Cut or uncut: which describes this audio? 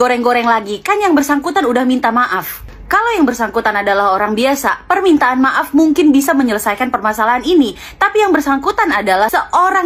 uncut